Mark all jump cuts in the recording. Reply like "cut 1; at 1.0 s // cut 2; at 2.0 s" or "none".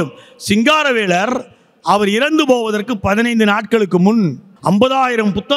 cut 1; at 4.5 s

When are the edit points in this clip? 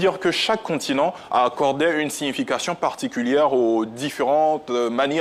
none

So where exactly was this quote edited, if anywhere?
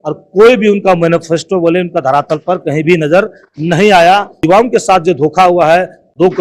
cut 1; at 4.3 s

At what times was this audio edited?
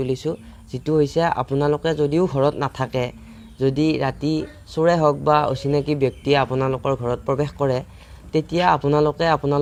none

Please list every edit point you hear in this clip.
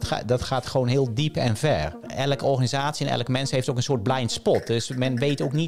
cut 1; at 2.1 s

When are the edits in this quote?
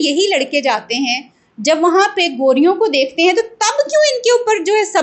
none

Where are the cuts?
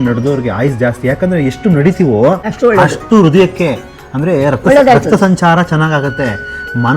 cut 1; at 2.5 s

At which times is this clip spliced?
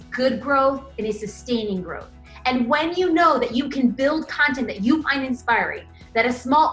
none

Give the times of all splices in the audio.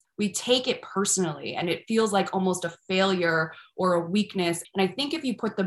cut 1; at 4.6 s

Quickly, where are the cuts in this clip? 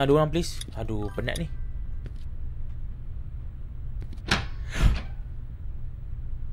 none

